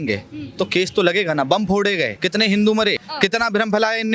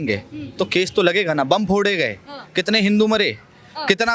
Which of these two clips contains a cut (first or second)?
first